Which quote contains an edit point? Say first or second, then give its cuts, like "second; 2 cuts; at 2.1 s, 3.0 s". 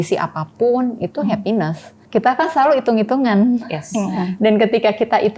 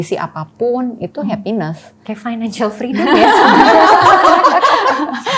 first; 1 cut; at 1.9 s